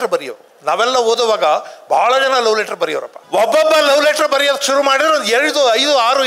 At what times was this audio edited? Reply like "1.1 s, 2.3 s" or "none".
3.1 s